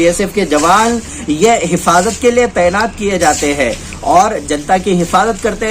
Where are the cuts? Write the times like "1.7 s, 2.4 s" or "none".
none